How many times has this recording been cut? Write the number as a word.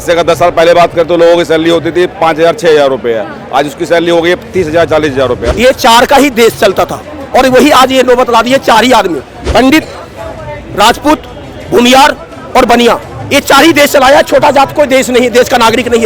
two